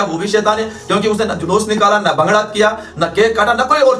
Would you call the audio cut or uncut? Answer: uncut